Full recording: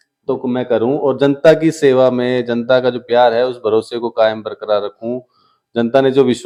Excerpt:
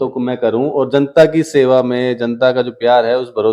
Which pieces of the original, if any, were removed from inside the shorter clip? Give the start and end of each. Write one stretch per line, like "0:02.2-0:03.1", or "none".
none